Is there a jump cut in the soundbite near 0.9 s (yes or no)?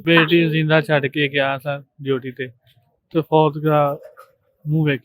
no